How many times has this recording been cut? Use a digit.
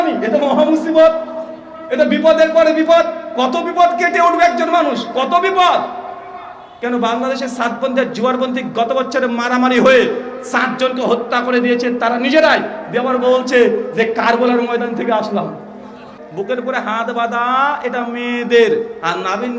1